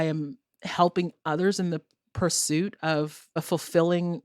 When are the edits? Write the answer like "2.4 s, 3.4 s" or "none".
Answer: 3.3 s